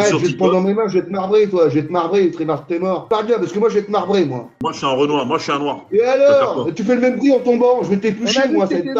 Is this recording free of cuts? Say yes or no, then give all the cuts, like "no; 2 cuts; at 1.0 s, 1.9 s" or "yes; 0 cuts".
no; 1 cut; at 4.6 s